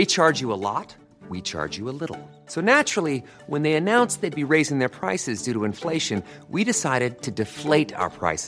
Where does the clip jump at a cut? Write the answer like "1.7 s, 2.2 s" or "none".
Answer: none